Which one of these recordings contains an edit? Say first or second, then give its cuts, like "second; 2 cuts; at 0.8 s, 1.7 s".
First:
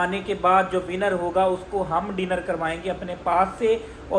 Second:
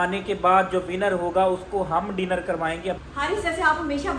second; 1 cut; at 3.0 s